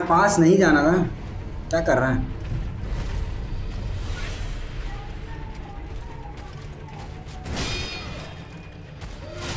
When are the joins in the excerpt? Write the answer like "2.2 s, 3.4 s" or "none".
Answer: none